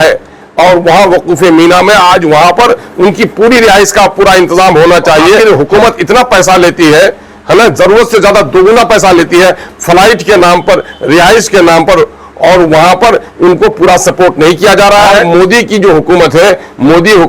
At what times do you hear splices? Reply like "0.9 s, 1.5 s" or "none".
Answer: 5.4 s, 15.2 s